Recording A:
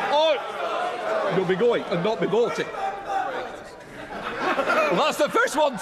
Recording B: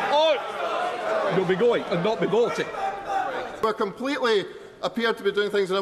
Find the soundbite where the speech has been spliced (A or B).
B